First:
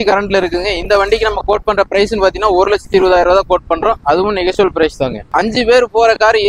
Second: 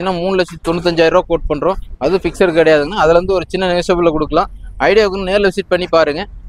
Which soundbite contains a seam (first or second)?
first